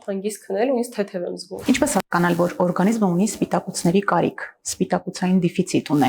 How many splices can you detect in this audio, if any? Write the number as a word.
one